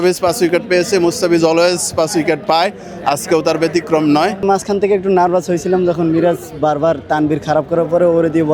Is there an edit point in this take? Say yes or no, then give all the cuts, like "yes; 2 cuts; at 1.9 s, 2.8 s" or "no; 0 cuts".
yes; 1 cut; at 4.4 s